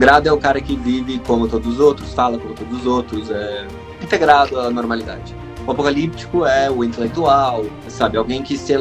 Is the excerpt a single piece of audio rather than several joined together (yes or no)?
no